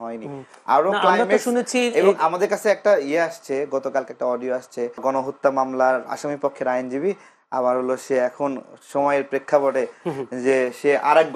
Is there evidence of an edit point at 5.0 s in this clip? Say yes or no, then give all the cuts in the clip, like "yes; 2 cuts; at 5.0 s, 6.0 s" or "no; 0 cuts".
yes; 1 cut; at 5.0 s